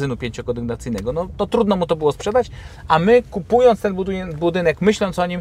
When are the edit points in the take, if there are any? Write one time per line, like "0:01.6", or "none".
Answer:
none